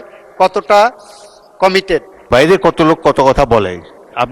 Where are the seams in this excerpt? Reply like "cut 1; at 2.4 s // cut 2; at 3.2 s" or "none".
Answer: cut 1; at 2.3 s